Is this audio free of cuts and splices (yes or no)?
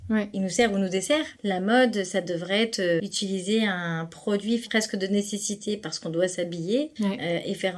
no